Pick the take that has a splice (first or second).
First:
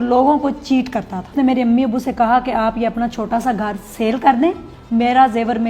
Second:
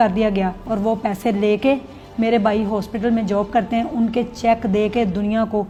first